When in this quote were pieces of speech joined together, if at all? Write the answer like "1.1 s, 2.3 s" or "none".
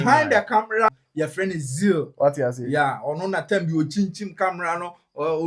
1.0 s